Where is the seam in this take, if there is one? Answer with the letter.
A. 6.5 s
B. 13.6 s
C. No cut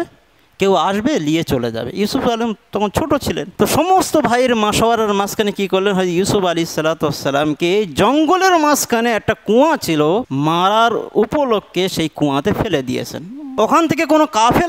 B